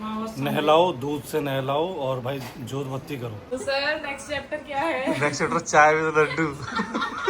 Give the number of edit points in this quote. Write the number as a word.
one